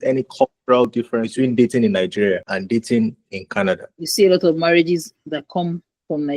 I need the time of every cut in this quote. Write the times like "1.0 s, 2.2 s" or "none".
0.9 s, 2.5 s, 4.0 s